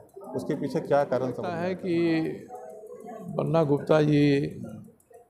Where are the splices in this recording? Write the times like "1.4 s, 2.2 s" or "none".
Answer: 1.6 s